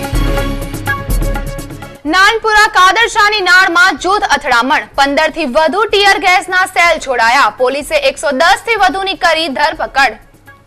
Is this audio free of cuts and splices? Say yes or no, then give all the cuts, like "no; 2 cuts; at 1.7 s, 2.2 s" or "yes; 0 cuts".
yes; 0 cuts